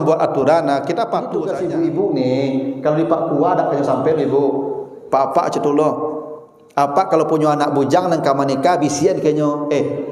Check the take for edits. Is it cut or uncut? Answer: cut